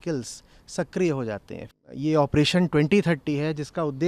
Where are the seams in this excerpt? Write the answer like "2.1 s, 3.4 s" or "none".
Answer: 1.6 s